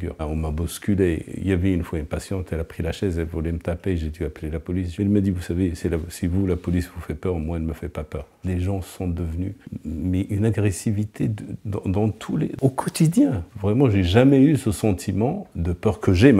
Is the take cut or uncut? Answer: cut